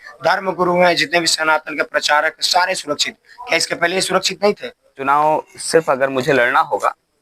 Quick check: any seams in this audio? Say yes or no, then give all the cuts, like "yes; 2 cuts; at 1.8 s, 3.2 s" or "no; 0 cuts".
yes; 1 cut; at 5.0 s